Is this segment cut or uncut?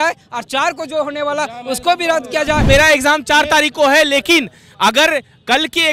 cut